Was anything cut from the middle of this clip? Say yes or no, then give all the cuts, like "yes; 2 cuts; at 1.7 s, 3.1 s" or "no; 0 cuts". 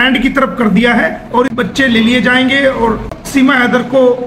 yes; 2 cuts; at 1.5 s, 3.2 s